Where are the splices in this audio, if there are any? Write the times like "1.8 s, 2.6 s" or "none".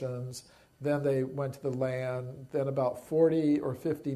2.0 s